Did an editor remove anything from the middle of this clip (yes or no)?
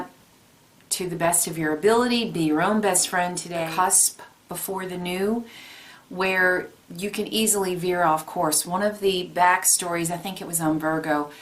yes